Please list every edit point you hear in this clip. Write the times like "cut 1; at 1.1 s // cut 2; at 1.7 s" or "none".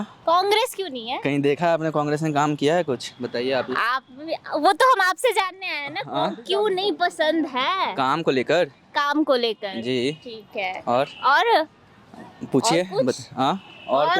none